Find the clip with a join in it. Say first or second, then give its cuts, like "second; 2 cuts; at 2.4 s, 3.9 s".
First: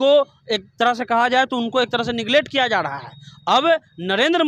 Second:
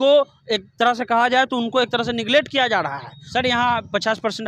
second; 1 cut; at 3.1 s